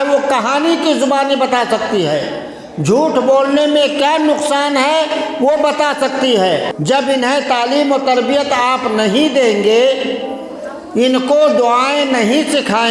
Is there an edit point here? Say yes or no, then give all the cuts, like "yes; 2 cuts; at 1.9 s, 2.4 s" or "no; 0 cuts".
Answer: yes; 1 cut; at 6.7 s